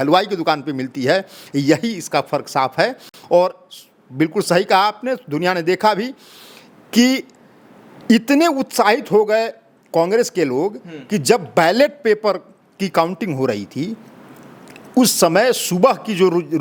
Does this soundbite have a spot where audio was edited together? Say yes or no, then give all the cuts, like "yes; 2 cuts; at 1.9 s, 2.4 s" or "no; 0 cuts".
no; 0 cuts